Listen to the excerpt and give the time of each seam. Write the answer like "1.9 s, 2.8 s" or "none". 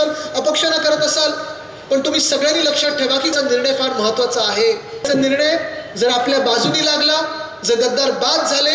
3.3 s, 5.1 s